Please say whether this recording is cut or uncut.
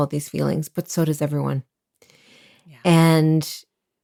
uncut